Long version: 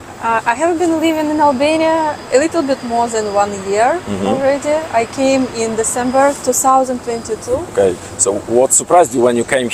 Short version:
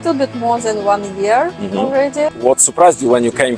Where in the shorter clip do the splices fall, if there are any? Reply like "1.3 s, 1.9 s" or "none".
2.4 s